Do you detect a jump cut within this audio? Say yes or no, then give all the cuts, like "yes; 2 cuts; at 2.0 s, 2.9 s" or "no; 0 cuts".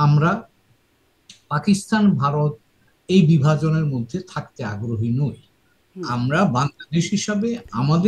no; 0 cuts